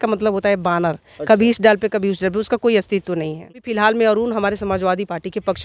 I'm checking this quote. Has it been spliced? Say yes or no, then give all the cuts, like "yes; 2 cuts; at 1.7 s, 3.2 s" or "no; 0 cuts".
yes; 1 cut; at 3.6 s